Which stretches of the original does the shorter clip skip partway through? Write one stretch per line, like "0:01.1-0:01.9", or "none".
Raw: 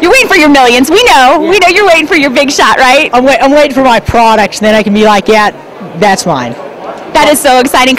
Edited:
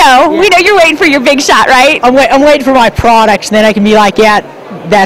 none

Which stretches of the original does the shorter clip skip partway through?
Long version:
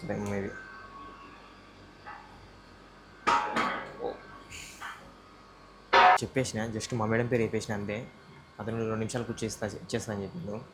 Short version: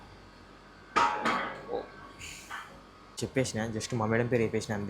0:05.6-0:06.3

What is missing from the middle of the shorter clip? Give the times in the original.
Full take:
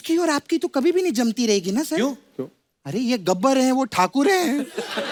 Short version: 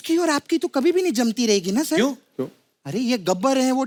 none

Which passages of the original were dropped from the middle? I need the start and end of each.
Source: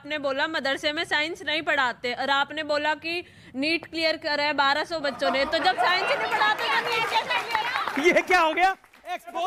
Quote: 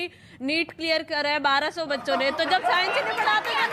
none

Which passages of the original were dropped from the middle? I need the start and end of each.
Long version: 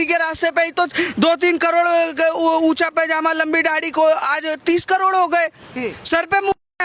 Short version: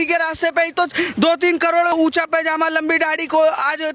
0:01.9-0:02.6

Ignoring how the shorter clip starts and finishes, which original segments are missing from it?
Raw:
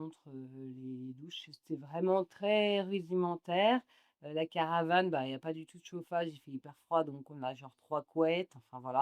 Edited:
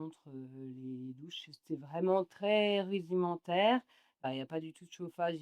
0:04.3-0:05.2

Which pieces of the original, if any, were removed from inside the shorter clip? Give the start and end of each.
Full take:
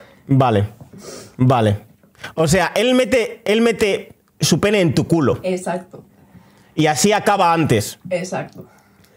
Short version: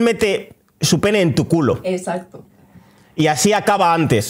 none

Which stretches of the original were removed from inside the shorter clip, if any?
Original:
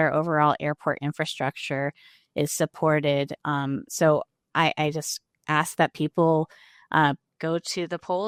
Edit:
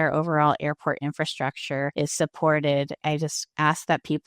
0:01.9-0:02.3
0:03.5-0:05.0

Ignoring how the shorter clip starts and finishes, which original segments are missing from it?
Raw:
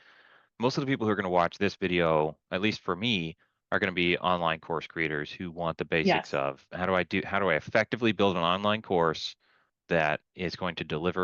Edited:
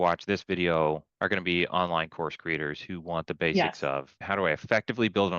0:02.4-0:03.6
0:06.7-0:07.3

